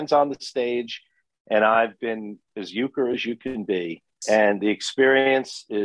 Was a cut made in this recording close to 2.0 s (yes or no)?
no